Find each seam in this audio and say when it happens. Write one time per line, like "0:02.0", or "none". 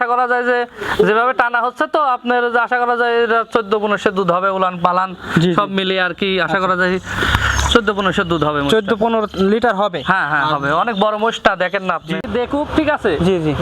0:12.2